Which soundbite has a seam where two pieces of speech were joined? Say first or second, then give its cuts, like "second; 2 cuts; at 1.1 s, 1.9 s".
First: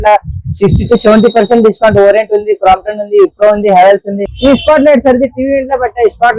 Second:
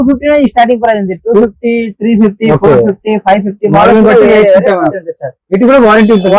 first; 1 cut; at 4.3 s